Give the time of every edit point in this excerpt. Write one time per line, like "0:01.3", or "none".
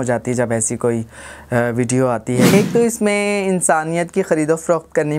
0:02.5